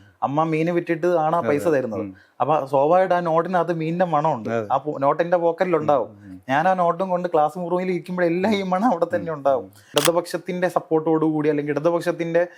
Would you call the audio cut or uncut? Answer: cut